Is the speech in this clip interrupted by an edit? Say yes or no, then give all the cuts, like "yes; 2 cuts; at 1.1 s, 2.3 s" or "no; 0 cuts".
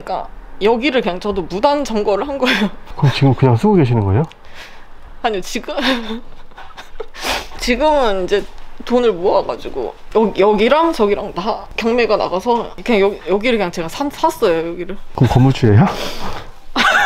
no; 0 cuts